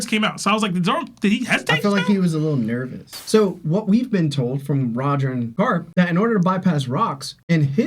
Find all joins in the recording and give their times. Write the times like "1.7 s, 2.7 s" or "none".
3.1 s, 5.5 s